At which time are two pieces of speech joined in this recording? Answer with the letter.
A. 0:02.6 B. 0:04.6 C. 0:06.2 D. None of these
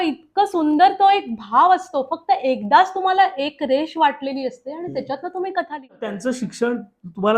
C